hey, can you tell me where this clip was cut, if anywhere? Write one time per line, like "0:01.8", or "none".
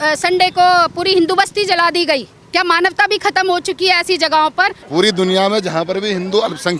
0:02.4
0:04.8

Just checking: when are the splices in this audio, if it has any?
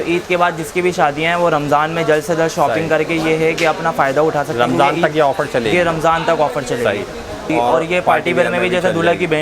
0:07.5

